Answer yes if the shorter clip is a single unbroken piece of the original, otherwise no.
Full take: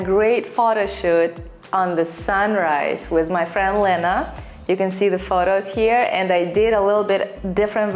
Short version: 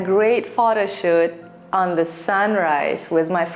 yes